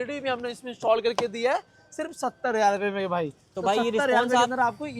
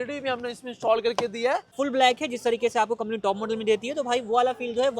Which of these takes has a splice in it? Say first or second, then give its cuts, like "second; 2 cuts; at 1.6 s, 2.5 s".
second; 1 cut; at 1.7 s